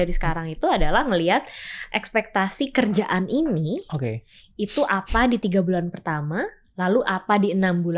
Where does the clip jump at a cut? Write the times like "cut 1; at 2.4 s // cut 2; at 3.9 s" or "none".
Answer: none